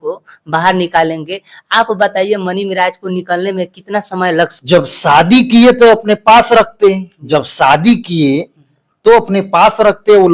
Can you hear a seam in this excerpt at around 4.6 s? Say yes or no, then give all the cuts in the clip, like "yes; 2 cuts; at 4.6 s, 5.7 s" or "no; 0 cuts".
yes; 1 cut; at 4.6 s